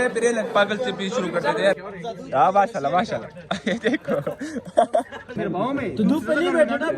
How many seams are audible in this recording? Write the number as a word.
two